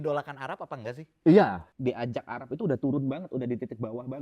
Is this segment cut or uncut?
cut